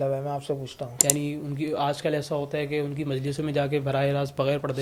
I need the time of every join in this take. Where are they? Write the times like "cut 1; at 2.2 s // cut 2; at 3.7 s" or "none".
none